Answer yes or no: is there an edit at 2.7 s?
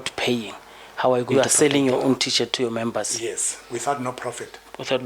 no